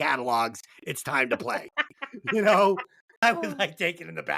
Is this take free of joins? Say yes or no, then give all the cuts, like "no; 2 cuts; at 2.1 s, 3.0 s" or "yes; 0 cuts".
no; 1 cut; at 3.2 s